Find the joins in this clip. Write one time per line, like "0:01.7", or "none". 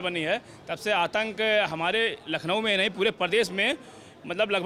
none